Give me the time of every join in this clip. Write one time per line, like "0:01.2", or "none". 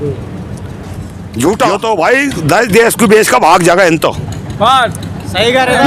0:01.8